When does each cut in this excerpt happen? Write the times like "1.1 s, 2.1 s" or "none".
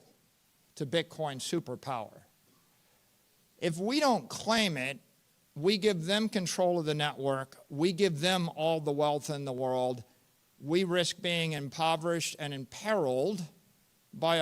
none

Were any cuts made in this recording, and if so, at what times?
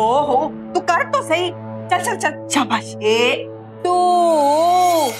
2.9 s

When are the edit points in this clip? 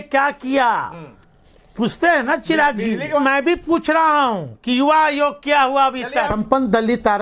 3.2 s, 6.3 s

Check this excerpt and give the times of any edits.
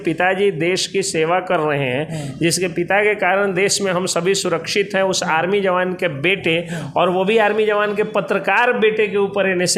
none

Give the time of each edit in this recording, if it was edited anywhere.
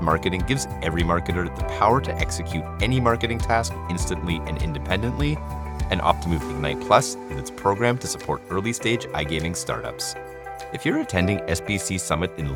none

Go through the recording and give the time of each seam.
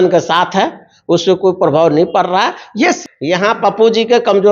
3.0 s

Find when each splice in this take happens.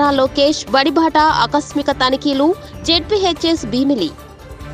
none

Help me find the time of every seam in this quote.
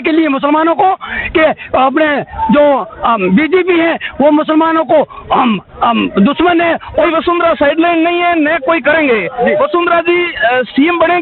7.1 s

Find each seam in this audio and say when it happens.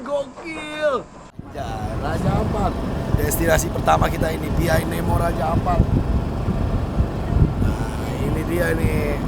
1.4 s

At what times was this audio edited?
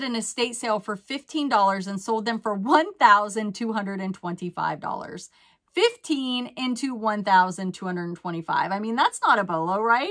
none

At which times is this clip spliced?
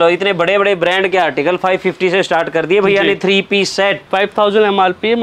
4.0 s

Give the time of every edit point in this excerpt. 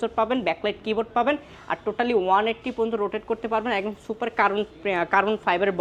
none

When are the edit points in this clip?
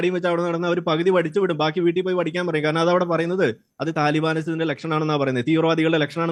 none

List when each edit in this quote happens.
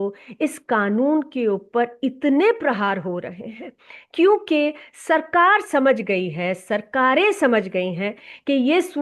none

